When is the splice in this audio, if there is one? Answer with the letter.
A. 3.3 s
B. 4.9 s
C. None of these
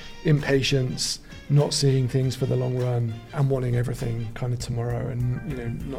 A